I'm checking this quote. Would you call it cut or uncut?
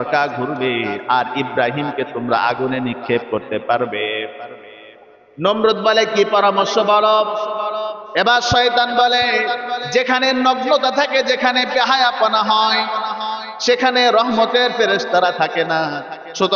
uncut